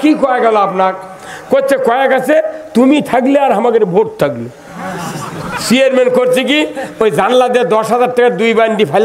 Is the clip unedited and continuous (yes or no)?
yes